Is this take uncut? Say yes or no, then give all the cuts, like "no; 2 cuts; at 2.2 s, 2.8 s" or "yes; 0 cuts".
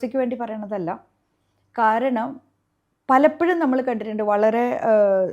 yes; 0 cuts